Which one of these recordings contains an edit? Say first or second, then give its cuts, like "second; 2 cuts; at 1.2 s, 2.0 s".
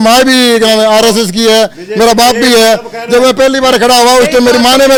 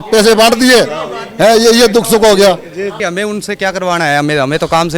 second; 1 cut; at 3.0 s